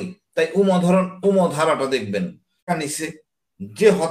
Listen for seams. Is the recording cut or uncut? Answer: cut